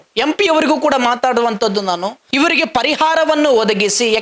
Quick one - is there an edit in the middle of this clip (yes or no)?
yes